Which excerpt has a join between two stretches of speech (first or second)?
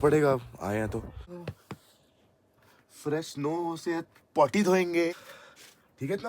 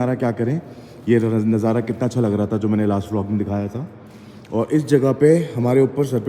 first